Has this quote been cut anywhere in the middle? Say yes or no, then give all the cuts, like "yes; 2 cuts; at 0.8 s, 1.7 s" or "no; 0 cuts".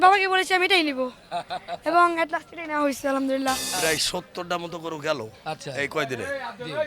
yes; 1 cut; at 3.7 s